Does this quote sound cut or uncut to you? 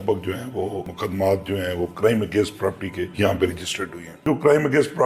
cut